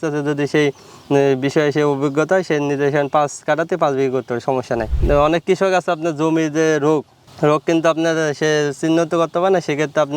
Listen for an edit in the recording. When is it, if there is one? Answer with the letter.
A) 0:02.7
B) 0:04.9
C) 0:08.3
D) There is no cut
B